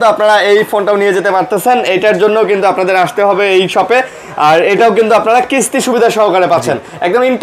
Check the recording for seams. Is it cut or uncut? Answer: uncut